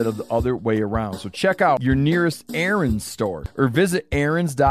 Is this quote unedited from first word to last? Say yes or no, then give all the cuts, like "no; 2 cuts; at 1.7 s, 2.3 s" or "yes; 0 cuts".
no; 2 cuts; at 1.8 s, 3.4 s